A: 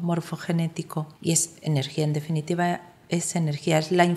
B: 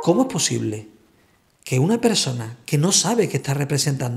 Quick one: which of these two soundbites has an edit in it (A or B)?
A